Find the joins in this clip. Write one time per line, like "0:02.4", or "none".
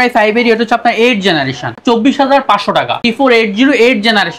0:01.8
0:03.0